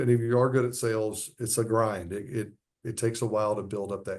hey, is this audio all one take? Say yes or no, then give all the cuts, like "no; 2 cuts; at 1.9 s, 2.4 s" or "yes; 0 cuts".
yes; 0 cuts